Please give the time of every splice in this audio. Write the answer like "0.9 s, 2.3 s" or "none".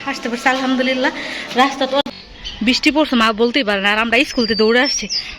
2.1 s